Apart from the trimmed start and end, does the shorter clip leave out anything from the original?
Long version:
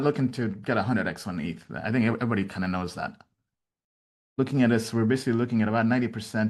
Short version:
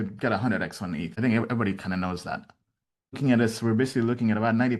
yes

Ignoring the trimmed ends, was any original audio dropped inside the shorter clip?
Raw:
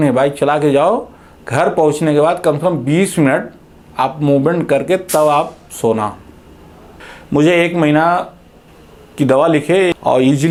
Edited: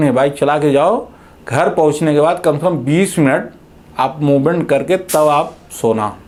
no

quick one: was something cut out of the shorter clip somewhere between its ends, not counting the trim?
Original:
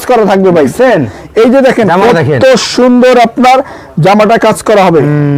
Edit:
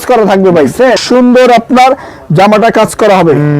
yes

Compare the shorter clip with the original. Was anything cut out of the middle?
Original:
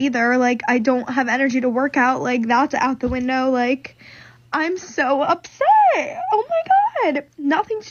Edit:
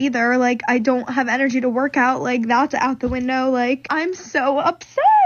yes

